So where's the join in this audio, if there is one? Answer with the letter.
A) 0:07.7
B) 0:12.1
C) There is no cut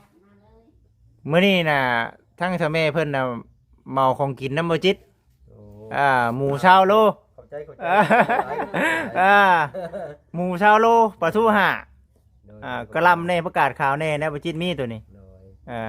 C